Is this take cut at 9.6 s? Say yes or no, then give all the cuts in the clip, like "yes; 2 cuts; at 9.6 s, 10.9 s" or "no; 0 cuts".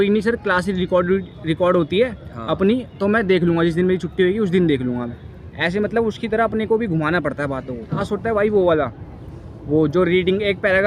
no; 1 cut; at 8.0 s